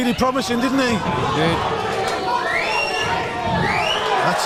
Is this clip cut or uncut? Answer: uncut